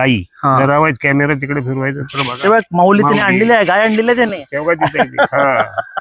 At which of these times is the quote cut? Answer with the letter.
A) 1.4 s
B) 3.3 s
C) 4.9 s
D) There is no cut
D